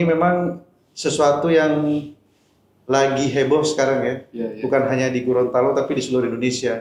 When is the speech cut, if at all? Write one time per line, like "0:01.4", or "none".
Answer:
none